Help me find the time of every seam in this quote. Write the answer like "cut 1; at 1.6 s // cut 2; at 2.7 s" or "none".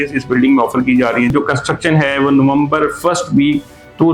cut 1; at 1.3 s